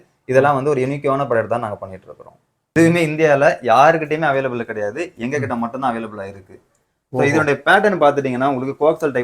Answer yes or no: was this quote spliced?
yes